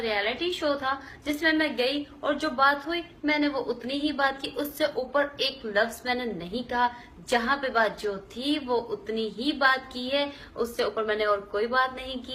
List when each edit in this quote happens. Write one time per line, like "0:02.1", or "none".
none